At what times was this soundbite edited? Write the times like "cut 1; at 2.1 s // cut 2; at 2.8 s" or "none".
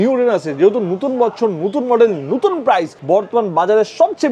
cut 1; at 2.9 s